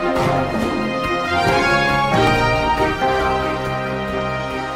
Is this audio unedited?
yes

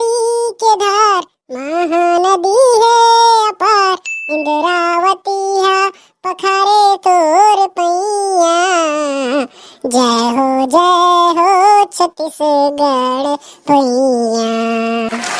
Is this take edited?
no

